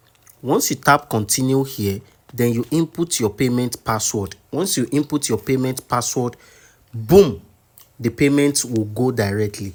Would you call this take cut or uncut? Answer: uncut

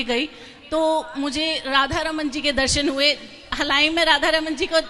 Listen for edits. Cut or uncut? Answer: uncut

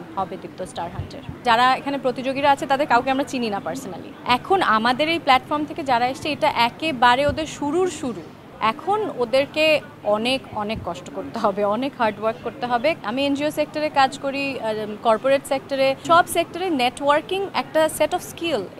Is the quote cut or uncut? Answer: cut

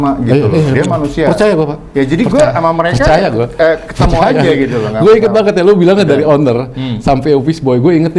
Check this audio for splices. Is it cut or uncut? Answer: uncut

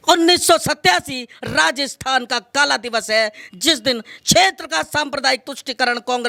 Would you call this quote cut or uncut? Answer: uncut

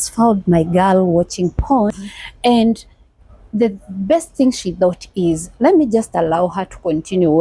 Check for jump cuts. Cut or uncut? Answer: cut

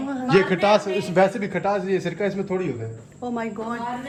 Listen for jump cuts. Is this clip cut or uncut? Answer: uncut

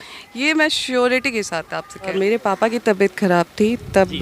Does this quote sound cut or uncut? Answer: cut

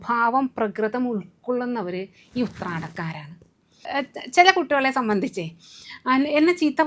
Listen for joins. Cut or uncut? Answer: cut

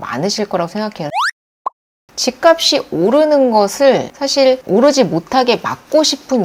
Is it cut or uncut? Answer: cut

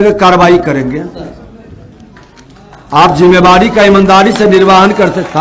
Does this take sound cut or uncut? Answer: uncut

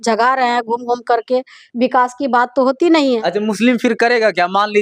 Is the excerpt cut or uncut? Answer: cut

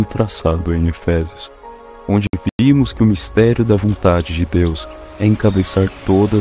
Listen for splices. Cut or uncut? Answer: uncut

